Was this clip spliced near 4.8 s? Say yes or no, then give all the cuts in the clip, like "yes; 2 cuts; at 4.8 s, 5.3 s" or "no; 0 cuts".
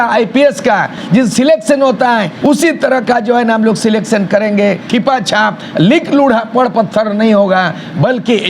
yes; 3 cuts; at 1.0 s, 2.3 s, 4.8 s